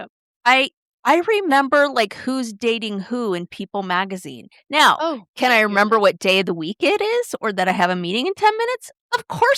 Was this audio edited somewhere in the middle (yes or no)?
no